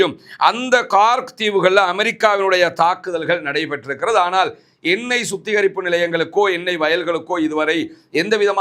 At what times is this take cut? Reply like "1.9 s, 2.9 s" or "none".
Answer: none